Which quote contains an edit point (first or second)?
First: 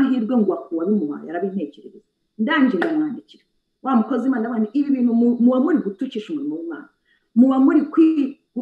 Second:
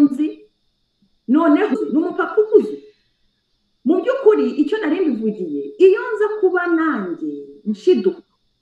second